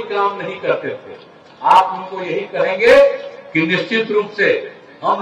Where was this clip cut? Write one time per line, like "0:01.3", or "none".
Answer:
none

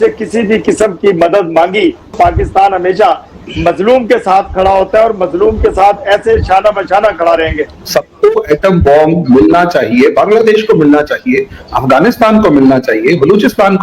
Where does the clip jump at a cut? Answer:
0:02.1
0:07.8

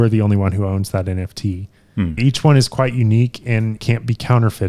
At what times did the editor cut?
0:02.2
0:03.8

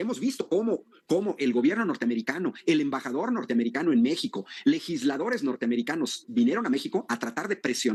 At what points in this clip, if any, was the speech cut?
none

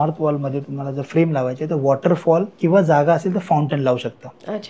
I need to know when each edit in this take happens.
0:02.5

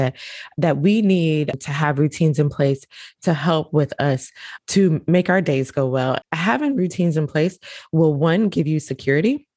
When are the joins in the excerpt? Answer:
0:01.6
0:04.5
0:06.2

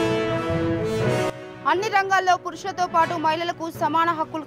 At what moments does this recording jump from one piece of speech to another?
0:01.3

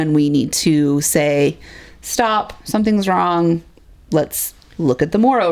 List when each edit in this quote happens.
none

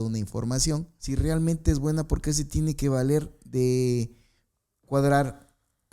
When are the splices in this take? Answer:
0:01.0

